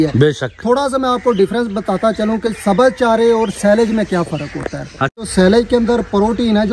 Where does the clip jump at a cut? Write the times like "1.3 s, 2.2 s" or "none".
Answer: 5.3 s